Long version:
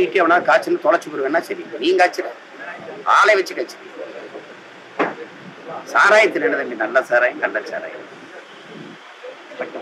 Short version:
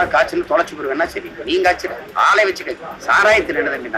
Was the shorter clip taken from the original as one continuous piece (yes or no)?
no